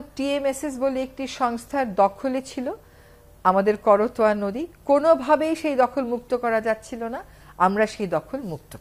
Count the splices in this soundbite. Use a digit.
0